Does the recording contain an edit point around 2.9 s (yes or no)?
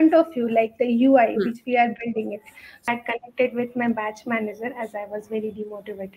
yes